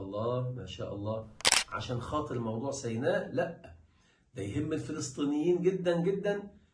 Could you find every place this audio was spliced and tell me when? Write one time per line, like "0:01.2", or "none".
0:01.6